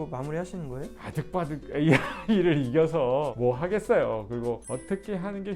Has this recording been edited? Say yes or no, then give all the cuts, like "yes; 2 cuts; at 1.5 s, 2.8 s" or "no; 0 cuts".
yes; 2 cuts; at 1.0 s, 4.6 s